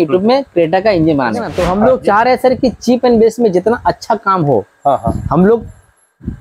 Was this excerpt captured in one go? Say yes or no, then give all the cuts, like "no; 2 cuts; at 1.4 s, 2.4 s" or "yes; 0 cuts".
no; 1 cut; at 1.5 s